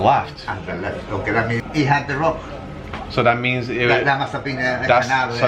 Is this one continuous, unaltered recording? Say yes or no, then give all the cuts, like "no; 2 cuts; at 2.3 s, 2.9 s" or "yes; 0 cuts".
no; 1 cut; at 1.6 s